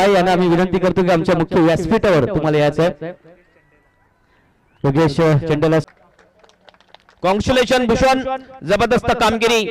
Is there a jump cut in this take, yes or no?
yes